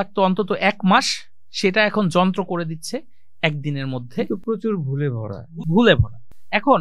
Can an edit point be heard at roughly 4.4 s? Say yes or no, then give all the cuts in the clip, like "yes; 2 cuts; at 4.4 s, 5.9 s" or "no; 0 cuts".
no; 0 cuts